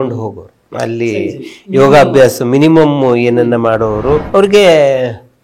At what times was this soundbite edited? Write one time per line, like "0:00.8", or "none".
0:04.3